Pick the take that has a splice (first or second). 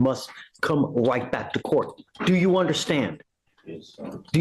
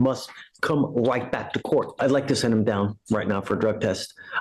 second